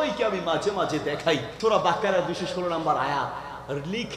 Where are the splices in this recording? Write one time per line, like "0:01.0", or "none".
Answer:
0:01.5